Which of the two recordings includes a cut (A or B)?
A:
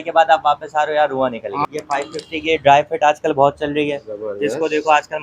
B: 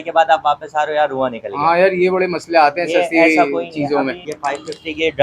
A